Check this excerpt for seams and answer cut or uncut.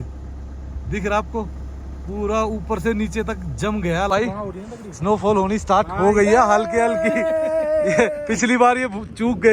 cut